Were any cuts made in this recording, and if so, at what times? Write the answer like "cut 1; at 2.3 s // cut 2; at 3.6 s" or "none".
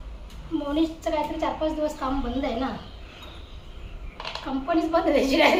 none